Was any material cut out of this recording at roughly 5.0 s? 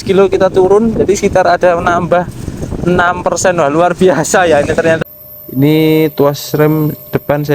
yes; 1 cut; at 5.0 s

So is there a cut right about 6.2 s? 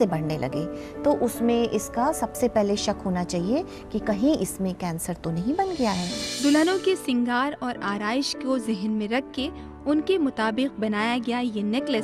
yes; 1 cut; at 6.2 s

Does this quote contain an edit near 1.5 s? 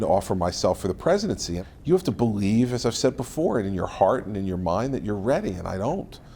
yes; 1 cut; at 1.5 s

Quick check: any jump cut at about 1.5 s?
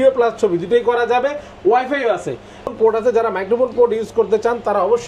no; 1 cut; at 2.7 s

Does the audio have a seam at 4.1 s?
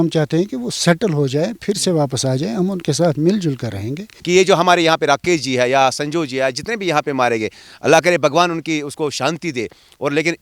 yes; 1 cut; at 4.1 s

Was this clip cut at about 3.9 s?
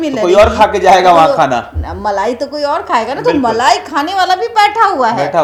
no; 0 cuts

